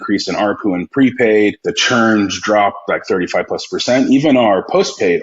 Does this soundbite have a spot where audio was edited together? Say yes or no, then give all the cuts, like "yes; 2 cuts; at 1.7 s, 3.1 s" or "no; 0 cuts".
yes; 1 cut; at 1.7 s